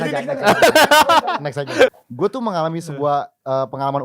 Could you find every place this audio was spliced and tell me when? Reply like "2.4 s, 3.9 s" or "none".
2.0 s